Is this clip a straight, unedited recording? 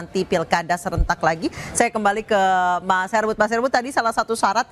yes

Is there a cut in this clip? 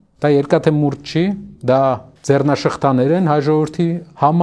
yes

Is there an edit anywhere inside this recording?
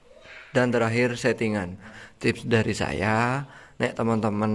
yes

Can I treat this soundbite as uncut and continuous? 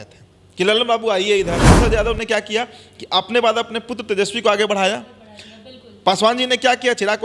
no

